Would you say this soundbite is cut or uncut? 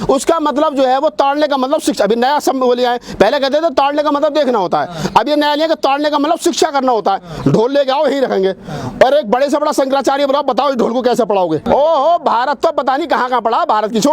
cut